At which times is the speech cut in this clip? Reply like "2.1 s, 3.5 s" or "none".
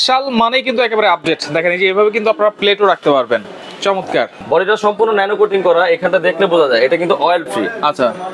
4.4 s